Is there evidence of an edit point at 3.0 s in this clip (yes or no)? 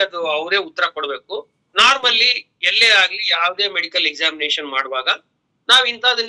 no